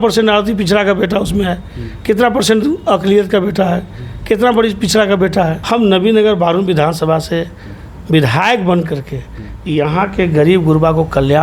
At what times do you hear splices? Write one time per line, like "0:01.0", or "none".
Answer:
0:05.6